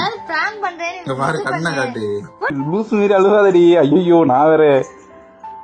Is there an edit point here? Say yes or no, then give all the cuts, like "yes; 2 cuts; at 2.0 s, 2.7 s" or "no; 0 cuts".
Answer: yes; 1 cut; at 2.5 s